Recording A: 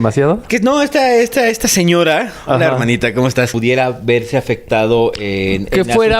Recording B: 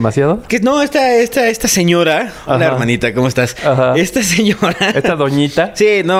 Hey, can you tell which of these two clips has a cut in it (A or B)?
A